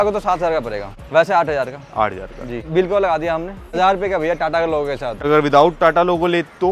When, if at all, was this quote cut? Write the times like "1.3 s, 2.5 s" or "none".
0.9 s, 2.7 s, 3.8 s, 5.2 s